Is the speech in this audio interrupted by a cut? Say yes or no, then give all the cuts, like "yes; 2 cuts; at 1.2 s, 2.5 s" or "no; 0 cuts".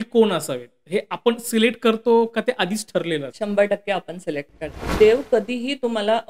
yes; 2 cuts; at 3.3 s, 4.9 s